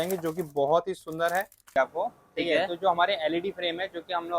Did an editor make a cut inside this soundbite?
yes; 1 cut; at 1.7 s

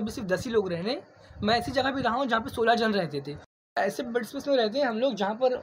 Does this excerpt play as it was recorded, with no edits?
no; 1 cut; at 3.7 s

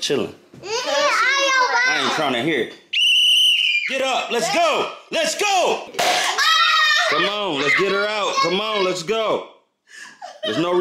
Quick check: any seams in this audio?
yes; 1 cut; at 5.9 s

